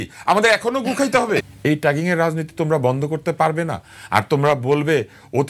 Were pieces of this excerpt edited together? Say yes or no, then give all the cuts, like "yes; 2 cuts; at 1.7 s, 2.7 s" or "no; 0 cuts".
yes; 1 cut; at 1.4 s